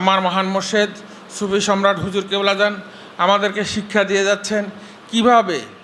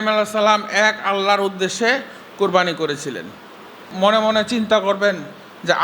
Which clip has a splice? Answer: second; 1 cut; at 3.9 s

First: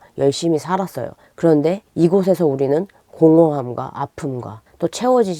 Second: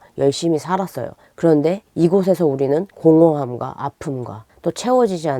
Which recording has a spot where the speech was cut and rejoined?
second; 1 cut; at 2.9 s

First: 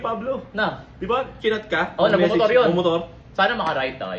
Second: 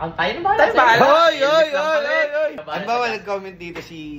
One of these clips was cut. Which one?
second; 1 cut; at 2.6 s

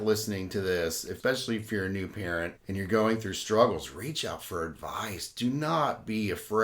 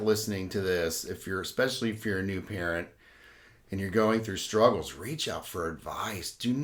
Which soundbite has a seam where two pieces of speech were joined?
first; 2 cuts; at 1.1 s, 2.6 s

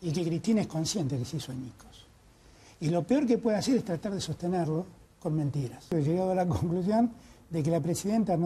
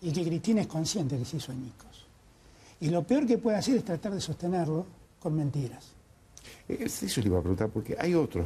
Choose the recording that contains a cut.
first; 1 cut; at 5.9 s

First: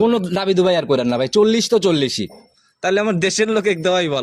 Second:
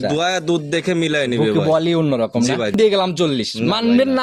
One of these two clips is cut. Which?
second; 1 cut; at 2.8 s

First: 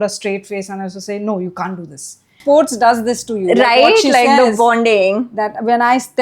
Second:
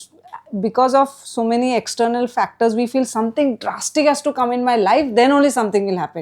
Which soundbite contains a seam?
first; 1 cut; at 2.4 s

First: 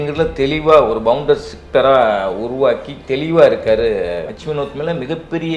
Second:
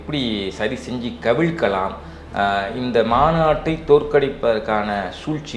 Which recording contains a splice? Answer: first; 1 cut; at 4.3 s

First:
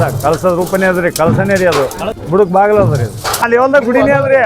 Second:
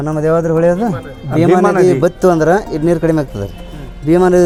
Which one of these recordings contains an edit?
first; 2 cuts; at 2.1 s, 3.7 s

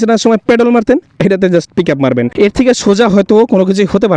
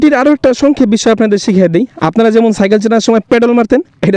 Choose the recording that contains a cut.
first; 1 cut; at 2.3 s

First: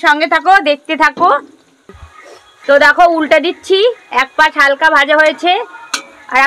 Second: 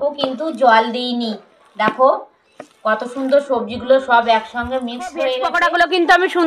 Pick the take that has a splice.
second; 1 cut; at 5.5 s

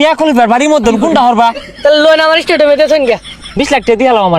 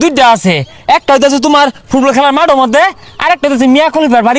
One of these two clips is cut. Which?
first; 2 cuts; at 1.6 s, 3.3 s

